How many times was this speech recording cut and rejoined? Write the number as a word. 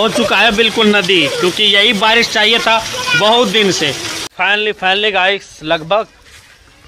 one